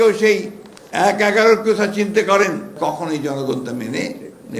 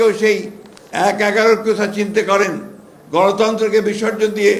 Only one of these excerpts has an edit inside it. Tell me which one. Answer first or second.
first